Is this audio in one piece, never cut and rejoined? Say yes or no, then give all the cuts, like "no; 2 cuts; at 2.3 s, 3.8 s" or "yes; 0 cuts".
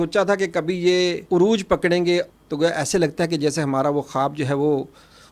no; 2 cuts; at 1.2 s, 2.3 s